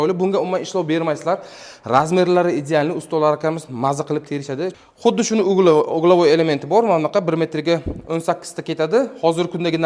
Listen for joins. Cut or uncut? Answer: cut